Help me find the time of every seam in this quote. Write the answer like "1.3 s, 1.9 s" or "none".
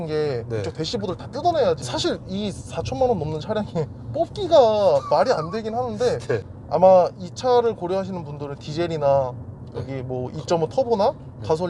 1.9 s, 6.5 s